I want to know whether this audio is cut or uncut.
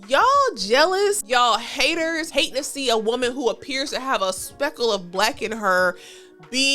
cut